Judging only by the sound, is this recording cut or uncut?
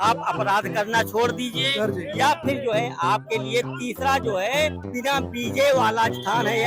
uncut